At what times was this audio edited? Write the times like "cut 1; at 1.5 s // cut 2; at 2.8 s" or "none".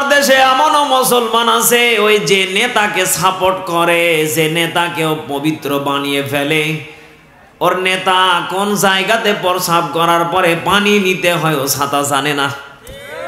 none